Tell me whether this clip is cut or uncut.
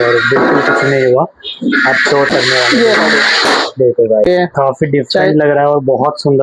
cut